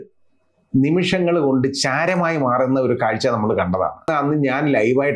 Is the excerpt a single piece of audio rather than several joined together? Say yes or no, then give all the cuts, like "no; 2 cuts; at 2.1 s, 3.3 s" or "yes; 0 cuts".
no; 1 cut; at 4.1 s